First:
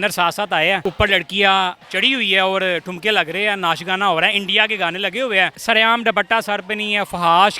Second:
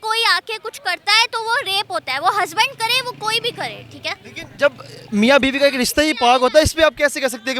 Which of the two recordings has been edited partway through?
first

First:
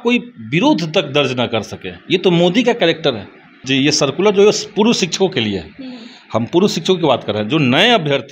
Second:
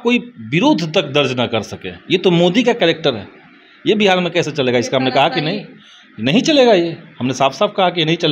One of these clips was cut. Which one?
first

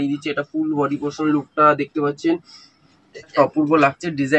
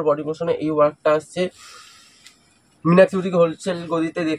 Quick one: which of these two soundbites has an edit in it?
first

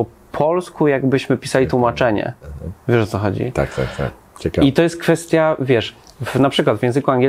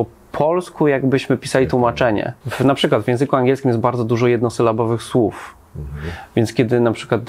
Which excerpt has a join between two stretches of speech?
second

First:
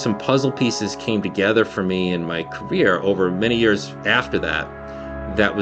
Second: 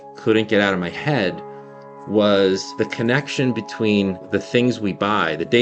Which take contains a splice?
second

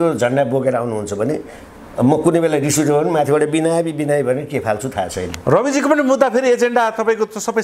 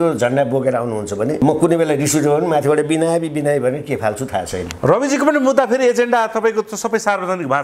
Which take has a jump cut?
second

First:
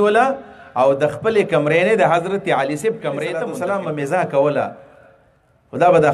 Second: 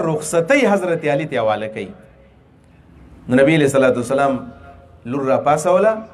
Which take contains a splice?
first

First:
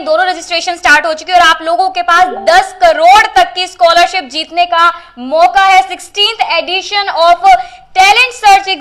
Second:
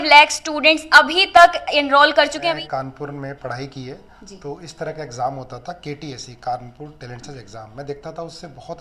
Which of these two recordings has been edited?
second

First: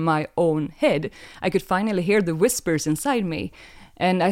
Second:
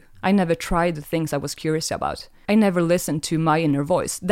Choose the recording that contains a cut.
second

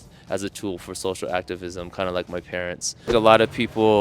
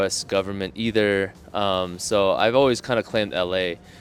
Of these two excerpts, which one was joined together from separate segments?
first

